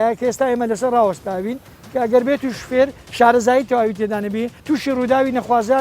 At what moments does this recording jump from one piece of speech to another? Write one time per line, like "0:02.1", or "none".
0:04.5